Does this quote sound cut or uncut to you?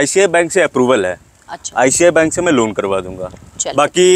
uncut